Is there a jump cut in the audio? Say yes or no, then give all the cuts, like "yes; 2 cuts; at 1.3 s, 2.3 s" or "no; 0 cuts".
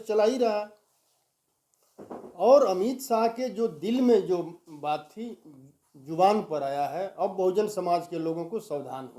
no; 0 cuts